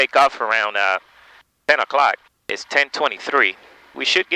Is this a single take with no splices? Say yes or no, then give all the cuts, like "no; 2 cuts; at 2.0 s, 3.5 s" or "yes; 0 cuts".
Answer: yes; 0 cuts